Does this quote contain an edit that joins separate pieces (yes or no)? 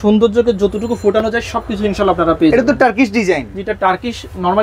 no